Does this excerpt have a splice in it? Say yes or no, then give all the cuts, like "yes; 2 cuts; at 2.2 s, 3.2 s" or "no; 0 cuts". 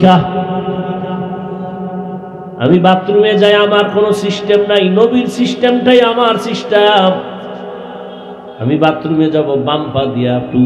no; 0 cuts